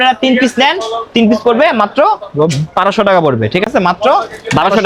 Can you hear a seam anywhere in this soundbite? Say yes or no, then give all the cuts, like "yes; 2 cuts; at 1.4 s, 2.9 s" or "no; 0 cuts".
no; 0 cuts